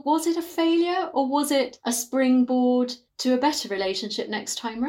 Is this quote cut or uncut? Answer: cut